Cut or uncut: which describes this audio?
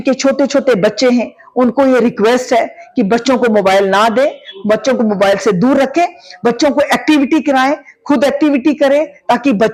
uncut